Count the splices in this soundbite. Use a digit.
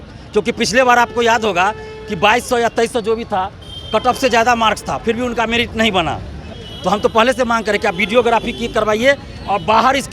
1